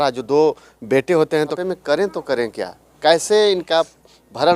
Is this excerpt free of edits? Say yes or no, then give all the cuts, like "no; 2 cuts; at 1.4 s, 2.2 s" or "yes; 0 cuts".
no; 1 cut; at 1.6 s